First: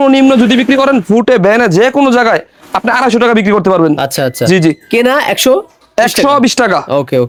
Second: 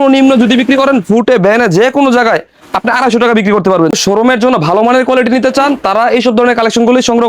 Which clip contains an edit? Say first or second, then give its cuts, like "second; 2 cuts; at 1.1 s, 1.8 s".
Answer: second; 1 cut; at 4.0 s